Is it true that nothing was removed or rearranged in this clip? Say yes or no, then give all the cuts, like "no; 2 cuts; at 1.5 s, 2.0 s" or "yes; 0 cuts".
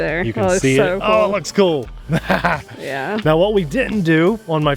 yes; 0 cuts